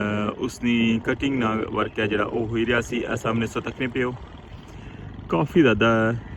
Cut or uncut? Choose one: uncut